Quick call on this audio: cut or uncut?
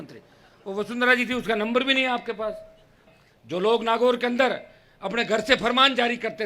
cut